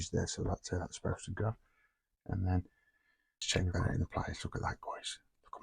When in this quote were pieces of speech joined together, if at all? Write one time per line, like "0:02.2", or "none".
0:03.4